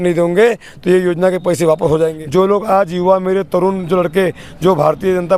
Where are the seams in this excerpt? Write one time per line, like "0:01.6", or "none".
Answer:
0:02.2